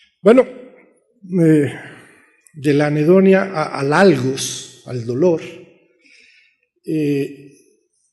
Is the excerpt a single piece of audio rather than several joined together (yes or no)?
no